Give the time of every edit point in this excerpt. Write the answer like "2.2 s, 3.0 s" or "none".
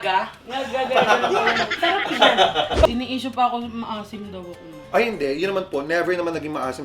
2.8 s